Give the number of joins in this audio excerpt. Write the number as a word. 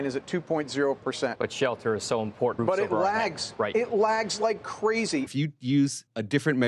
three